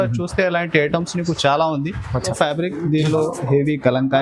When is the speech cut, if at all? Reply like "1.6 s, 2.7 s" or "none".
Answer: 2.3 s